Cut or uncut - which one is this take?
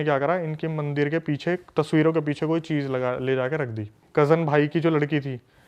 cut